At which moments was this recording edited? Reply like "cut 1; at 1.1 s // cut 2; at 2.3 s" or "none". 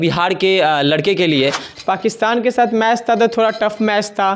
cut 1; at 1.7 s